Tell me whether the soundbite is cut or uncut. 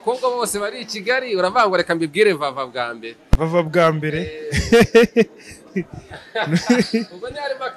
uncut